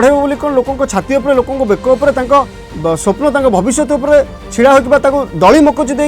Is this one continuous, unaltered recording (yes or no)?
yes